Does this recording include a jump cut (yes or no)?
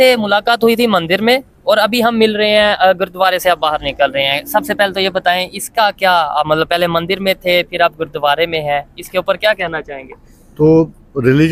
no